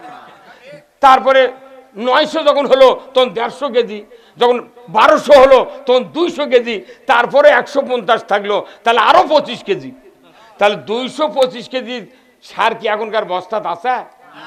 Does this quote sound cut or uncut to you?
uncut